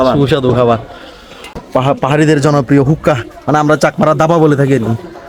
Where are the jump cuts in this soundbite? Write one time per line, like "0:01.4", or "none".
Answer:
0:01.5